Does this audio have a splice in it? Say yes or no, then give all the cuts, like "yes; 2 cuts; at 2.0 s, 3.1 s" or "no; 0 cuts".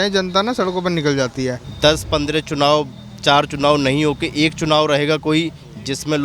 yes; 1 cut; at 1.7 s